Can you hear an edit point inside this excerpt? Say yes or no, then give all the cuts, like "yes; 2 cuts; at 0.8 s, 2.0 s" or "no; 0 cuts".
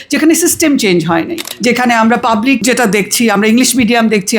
yes; 2 cuts; at 1.5 s, 2.6 s